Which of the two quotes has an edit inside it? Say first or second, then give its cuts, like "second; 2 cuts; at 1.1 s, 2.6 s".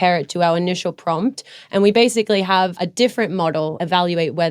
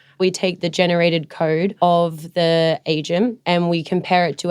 second; 1 cut; at 1.7 s